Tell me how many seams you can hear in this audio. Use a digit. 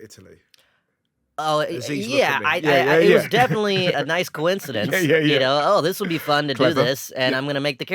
1